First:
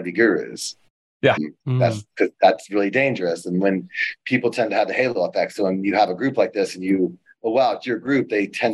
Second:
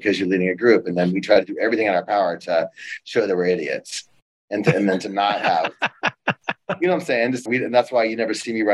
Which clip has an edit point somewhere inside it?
second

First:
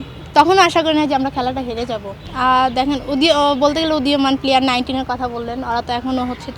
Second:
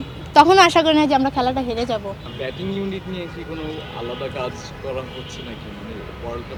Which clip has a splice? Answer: first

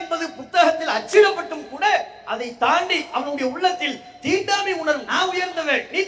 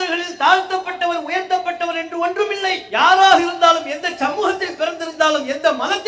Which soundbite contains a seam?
first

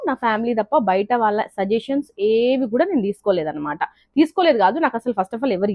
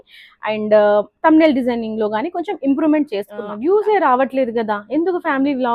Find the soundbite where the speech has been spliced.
second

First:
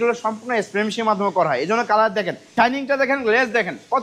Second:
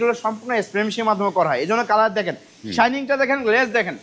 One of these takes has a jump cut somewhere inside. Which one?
first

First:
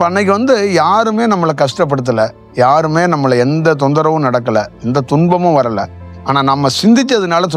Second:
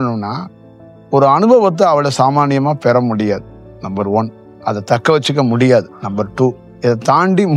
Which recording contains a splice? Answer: second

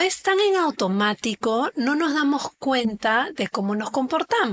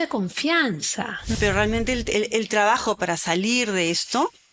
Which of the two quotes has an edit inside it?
second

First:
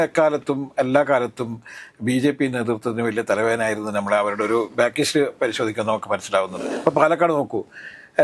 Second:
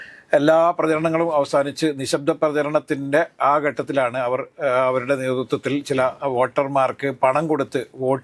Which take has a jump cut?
first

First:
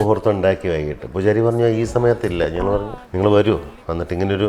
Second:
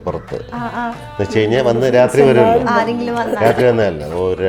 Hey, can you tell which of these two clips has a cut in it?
first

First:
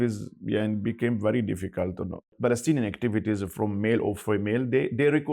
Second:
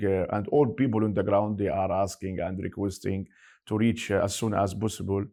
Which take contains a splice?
first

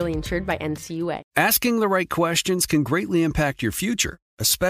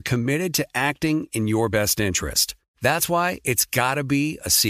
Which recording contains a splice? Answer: first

